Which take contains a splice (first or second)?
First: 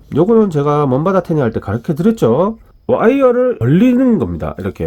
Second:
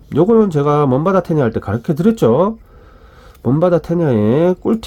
first